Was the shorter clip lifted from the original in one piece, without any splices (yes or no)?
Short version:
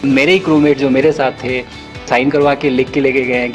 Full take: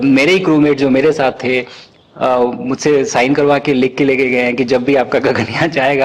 no